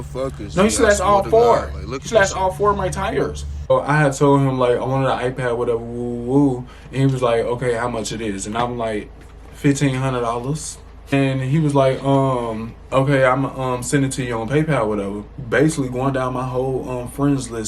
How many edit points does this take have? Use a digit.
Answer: 3